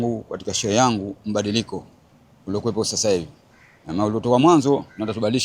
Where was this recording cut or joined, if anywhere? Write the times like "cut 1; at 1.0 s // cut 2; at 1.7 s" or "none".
none